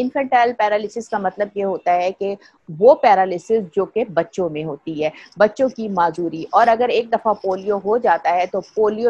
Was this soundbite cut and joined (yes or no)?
no